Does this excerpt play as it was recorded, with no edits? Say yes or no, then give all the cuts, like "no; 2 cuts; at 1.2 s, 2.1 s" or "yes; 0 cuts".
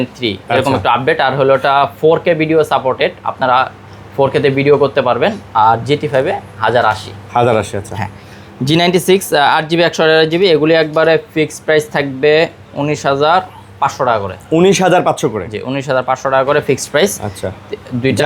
yes; 0 cuts